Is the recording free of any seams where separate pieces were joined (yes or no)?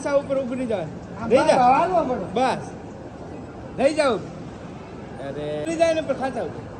no